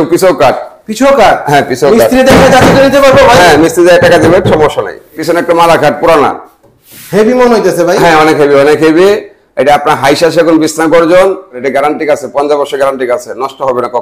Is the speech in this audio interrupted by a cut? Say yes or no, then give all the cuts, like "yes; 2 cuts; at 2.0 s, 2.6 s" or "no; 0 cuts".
yes; 2 cuts; at 5.2 s, 11.6 s